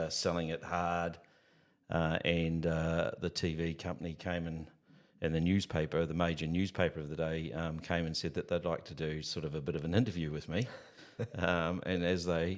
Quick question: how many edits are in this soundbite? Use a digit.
0